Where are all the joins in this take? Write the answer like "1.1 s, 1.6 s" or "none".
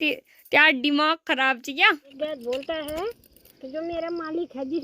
2.1 s

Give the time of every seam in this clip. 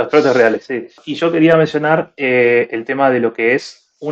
1.0 s

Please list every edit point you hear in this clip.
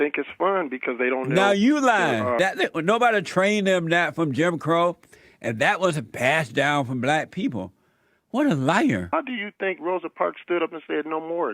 2.4 s, 9.1 s

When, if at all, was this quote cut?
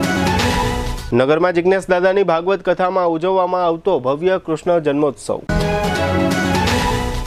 none

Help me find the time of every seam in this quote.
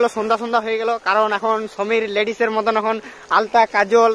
none

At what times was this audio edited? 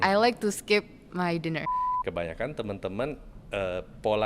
1.8 s

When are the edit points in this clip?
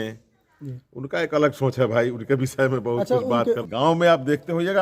3.6 s

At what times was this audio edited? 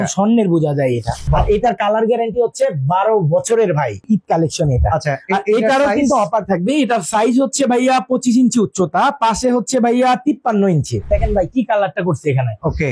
1.2 s, 4.0 s, 11.1 s

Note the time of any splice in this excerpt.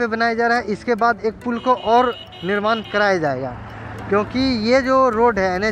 none

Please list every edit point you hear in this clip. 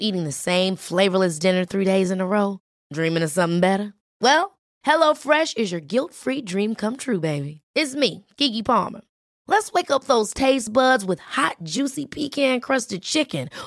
none

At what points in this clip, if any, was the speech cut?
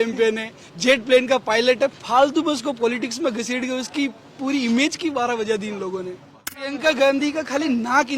6.8 s

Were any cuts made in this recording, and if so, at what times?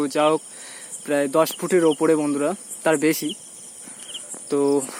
none

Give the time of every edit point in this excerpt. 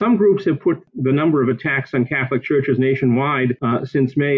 none

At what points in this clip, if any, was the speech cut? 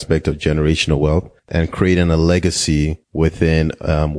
1.5 s, 3.0 s

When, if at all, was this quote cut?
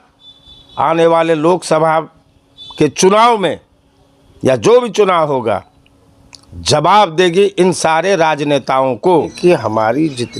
9.3 s

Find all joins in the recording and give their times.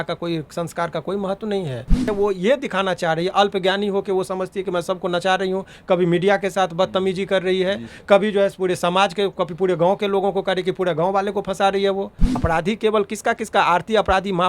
2.0 s, 12.3 s

